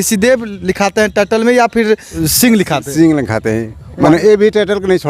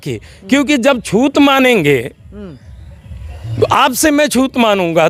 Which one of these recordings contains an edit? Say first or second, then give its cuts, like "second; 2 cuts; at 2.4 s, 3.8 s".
first; 2 cuts; at 2.2 s, 3.9 s